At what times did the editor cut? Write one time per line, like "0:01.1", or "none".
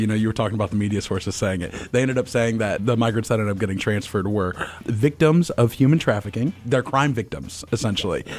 0:02.8
0:04.8
0:06.6